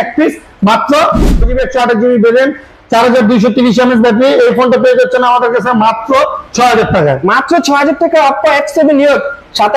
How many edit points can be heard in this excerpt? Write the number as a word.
one